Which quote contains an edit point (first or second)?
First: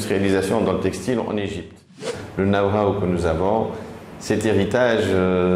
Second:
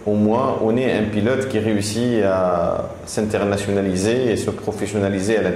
first